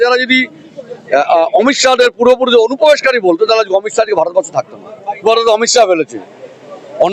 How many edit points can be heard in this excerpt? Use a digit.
1